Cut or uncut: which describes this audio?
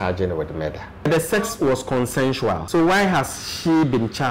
cut